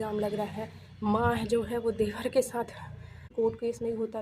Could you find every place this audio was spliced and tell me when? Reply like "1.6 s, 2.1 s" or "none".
3.3 s